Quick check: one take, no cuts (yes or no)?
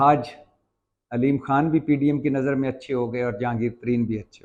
yes